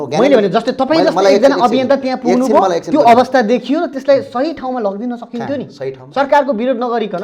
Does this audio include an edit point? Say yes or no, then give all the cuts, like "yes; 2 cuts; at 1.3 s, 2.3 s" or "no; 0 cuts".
no; 0 cuts